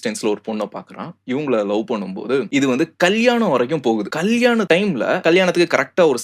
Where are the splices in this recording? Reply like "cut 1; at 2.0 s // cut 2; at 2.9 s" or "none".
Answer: none